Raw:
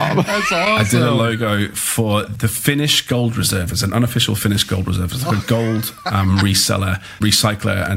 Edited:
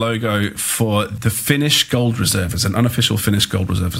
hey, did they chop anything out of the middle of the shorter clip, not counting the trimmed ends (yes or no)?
no